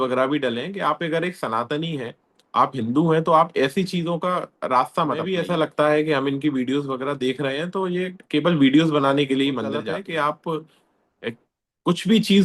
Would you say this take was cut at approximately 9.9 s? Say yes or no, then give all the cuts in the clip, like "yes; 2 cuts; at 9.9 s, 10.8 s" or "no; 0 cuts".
yes; 2 cuts; at 5.4 s, 9.9 s